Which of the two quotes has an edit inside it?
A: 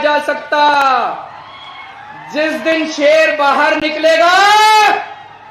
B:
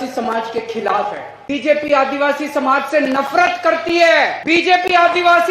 B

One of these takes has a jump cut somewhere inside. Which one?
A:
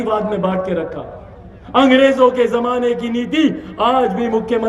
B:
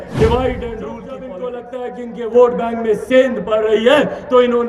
B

